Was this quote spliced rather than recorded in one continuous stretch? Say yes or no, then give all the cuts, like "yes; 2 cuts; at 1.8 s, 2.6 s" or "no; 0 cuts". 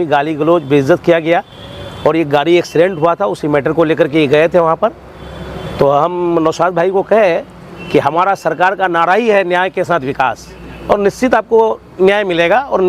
no; 0 cuts